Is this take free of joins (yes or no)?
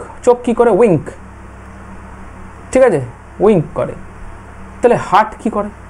yes